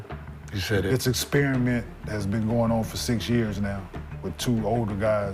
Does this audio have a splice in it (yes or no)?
no